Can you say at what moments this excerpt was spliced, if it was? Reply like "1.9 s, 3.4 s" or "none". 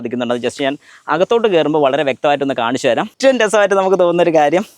3.1 s